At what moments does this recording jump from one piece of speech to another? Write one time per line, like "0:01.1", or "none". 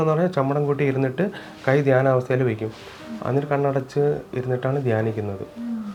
none